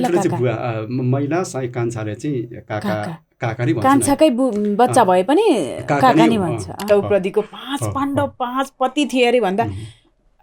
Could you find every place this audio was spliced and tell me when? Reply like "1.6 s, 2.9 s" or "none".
6.9 s

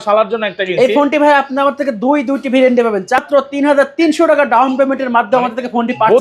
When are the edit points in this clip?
3.2 s

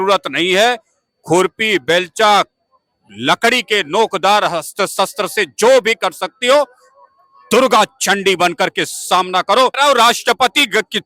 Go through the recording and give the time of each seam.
9.7 s

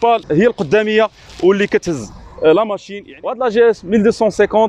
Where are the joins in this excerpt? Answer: 2.8 s

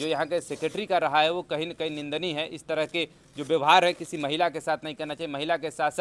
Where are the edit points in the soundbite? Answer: none

